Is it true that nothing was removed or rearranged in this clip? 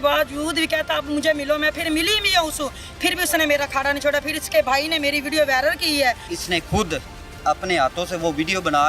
no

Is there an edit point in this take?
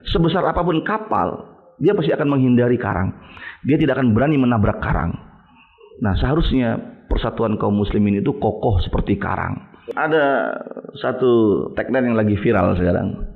yes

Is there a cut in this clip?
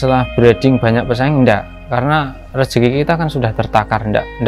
no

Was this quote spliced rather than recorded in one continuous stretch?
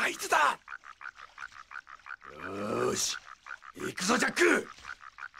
yes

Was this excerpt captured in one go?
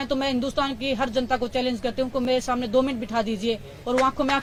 yes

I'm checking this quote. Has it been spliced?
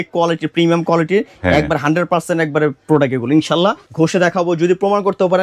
yes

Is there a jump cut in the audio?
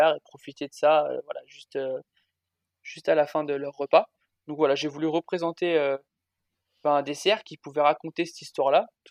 no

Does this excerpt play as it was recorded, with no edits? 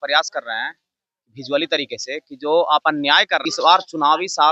no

